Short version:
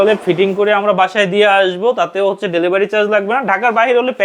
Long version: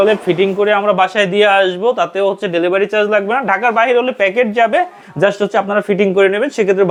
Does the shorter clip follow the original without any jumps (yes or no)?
yes